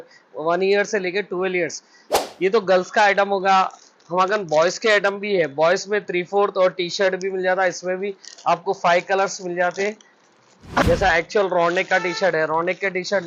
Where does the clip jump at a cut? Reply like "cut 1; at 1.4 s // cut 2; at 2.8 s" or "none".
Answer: cut 1; at 2.1 s // cut 2; at 10.8 s